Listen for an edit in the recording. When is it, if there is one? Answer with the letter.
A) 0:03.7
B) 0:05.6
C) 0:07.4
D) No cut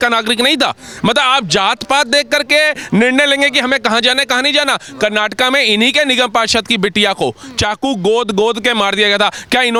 D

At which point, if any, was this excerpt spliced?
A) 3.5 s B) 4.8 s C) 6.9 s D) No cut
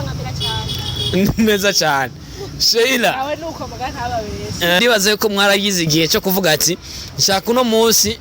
B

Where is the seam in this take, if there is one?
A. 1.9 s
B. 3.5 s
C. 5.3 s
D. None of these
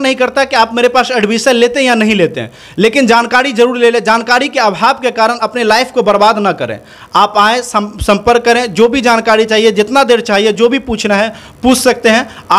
D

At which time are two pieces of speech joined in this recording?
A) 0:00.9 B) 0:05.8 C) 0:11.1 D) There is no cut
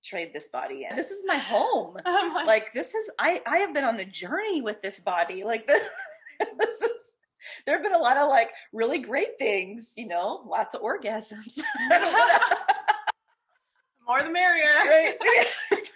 A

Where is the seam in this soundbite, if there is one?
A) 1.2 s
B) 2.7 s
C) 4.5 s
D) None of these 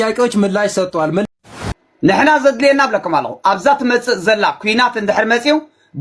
A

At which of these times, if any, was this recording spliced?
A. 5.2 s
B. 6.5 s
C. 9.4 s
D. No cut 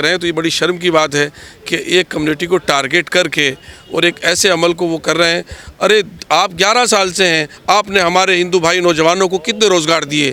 D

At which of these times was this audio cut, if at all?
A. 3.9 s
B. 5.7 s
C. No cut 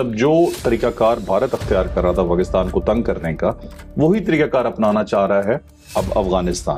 C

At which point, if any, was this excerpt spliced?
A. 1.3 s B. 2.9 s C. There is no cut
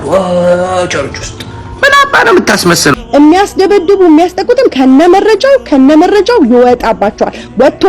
B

